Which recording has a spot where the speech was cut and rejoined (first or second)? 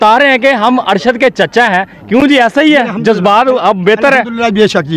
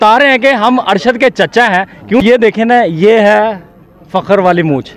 second